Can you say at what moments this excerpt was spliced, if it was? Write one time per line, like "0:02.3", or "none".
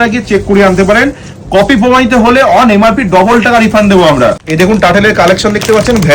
0:04.4